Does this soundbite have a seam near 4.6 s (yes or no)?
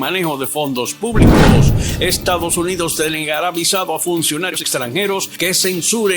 yes